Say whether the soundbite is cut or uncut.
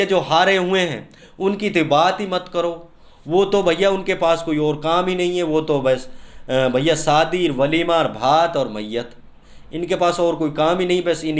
uncut